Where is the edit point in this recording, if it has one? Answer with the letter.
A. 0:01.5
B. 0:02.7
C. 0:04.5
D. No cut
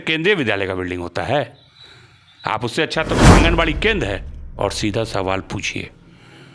C